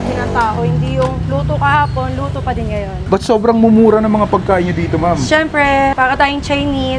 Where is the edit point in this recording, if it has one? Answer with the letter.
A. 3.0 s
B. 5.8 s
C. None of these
A